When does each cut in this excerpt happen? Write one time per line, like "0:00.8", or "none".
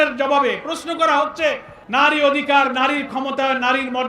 0:01.7